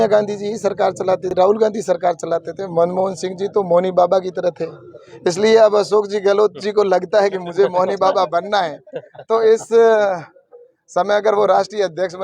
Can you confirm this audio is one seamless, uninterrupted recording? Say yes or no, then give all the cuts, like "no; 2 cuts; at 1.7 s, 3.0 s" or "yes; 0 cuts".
no; 1 cut; at 1.3 s